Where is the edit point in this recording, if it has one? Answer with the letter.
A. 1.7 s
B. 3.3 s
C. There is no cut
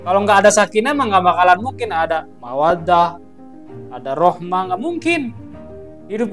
C